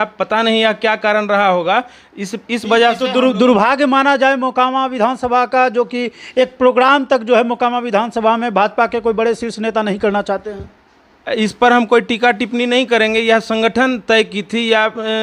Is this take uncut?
yes; 0 cuts

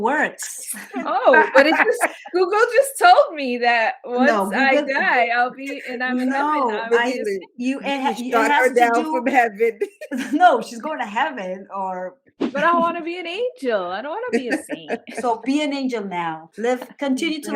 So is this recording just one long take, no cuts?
no; 1 cut; at 12.4 s

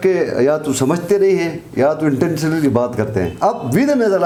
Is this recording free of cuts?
yes; 0 cuts

